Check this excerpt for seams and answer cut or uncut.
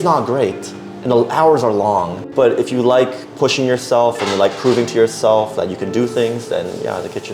cut